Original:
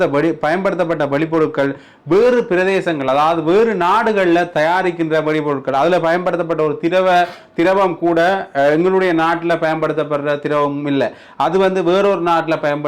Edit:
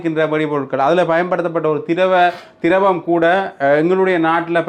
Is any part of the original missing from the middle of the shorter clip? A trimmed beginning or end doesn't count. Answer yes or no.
no